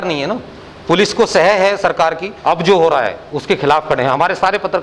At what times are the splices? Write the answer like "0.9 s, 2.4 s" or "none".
2.3 s